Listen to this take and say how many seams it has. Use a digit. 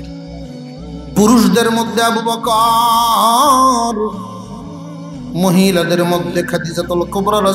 1